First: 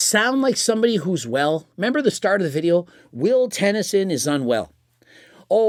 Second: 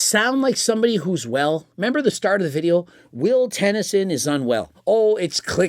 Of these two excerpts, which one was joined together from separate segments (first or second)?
second